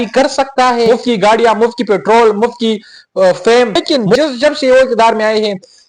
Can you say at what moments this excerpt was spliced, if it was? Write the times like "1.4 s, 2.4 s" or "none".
0.9 s, 3.9 s